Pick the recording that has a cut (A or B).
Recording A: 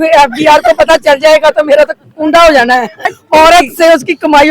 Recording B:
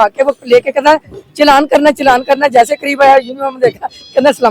A